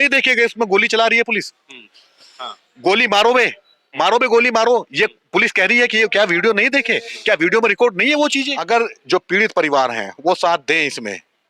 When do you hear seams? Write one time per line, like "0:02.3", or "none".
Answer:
0:08.5